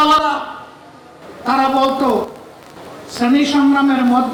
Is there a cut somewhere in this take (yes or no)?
no